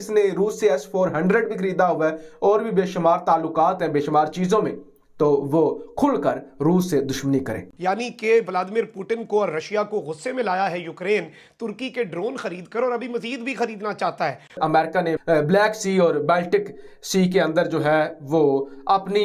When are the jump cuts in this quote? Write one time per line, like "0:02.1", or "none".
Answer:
0:07.6
0:14.8